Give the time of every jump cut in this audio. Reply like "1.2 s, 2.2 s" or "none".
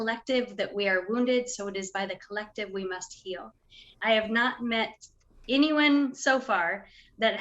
4.0 s